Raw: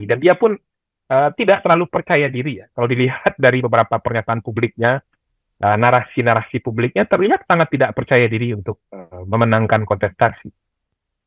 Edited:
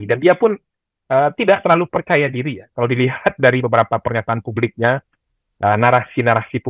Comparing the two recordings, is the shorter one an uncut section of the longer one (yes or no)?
yes